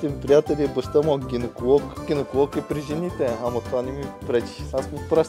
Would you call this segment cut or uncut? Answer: uncut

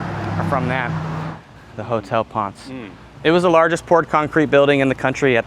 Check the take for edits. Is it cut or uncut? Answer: cut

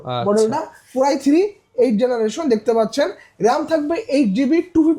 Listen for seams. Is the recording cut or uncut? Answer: uncut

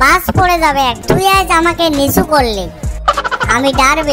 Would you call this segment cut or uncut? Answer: cut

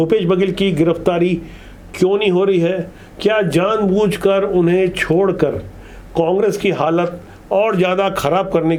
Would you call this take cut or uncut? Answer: uncut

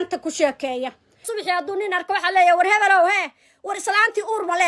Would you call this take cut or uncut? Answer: cut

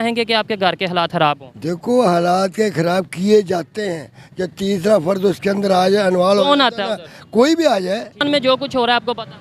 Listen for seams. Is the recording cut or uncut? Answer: cut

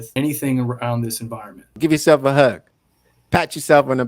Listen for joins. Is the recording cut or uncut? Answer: cut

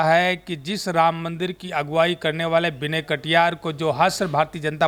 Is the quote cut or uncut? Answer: uncut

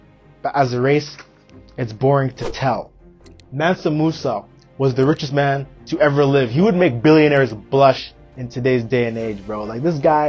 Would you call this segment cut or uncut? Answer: cut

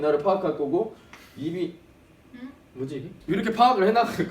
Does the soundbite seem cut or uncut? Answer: cut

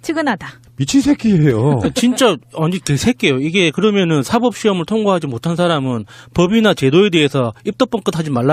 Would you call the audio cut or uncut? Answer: cut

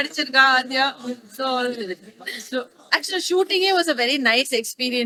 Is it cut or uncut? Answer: uncut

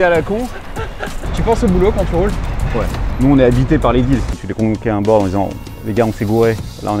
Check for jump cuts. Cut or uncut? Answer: cut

